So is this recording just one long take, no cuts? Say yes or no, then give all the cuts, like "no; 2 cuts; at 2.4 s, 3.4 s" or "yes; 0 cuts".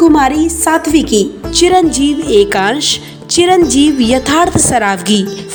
yes; 0 cuts